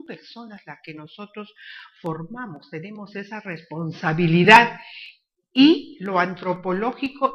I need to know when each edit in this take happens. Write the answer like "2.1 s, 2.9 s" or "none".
none

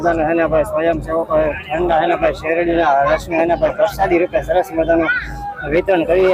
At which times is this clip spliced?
none

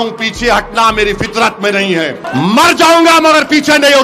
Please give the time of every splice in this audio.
2.2 s

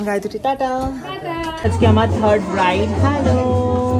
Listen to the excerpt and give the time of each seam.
1.8 s

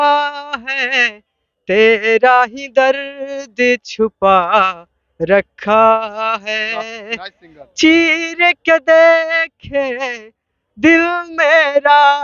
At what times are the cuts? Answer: none

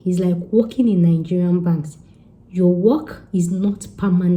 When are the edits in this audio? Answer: none

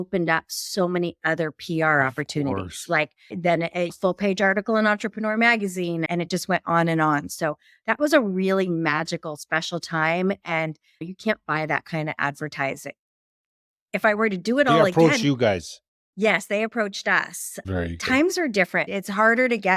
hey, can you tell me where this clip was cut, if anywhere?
none

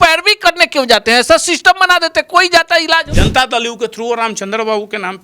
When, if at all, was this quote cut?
3.1 s

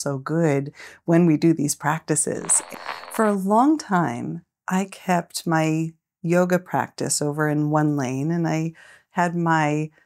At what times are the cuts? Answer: 2.6 s

